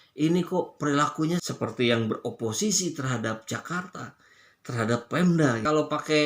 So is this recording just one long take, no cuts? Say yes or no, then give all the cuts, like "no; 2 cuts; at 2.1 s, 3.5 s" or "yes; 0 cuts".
no; 1 cut; at 1.5 s